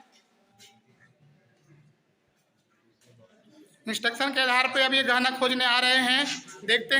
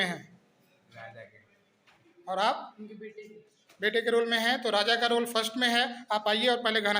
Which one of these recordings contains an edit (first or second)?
first